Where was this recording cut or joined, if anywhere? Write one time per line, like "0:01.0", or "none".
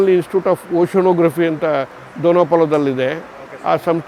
none

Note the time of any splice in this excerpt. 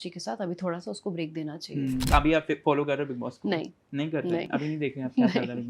0:02.1

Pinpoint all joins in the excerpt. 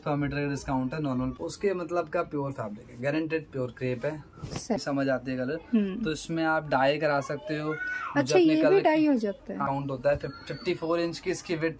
0:01.3
0:04.8
0:09.7

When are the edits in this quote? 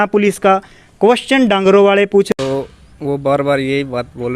0:02.3

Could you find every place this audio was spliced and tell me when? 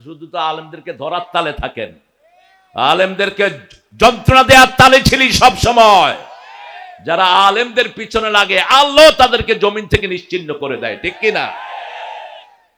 none

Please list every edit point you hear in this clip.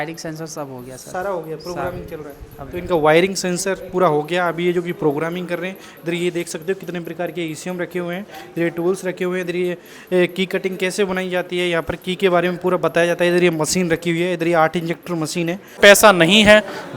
0:15.8

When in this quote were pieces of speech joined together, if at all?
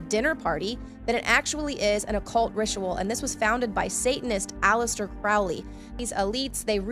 0:04.0

